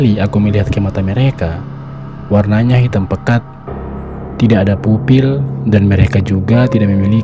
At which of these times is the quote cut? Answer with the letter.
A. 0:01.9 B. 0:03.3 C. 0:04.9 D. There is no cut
D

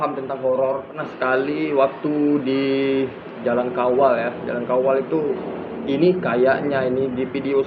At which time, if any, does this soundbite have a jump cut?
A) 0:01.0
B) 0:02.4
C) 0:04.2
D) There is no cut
A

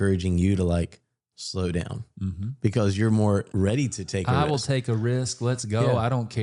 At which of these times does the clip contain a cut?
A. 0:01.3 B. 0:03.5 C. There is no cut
B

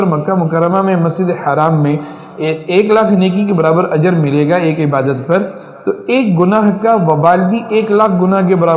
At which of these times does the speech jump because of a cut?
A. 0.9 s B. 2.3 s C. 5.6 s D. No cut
D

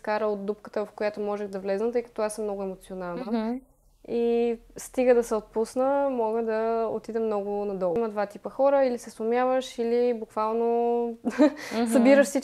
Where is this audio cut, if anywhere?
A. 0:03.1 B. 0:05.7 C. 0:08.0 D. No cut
C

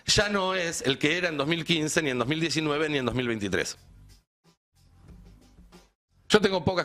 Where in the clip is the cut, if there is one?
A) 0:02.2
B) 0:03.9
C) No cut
B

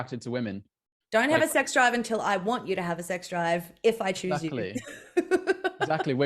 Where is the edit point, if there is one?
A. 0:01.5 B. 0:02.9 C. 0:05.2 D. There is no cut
D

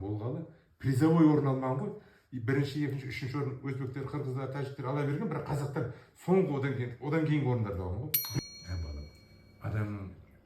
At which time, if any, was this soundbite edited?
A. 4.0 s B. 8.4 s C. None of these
B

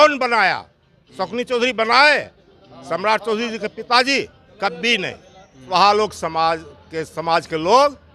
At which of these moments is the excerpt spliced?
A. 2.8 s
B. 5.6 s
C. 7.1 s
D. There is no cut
B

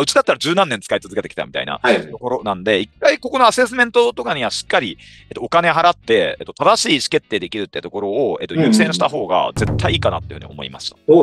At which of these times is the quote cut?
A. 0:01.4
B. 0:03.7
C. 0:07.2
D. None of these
D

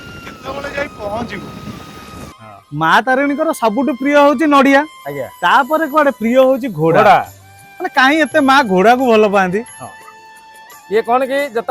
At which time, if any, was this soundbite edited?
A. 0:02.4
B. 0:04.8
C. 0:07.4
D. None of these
A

